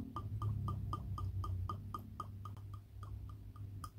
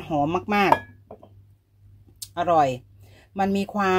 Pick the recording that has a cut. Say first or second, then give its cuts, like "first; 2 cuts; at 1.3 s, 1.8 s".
first; 1 cut; at 2.6 s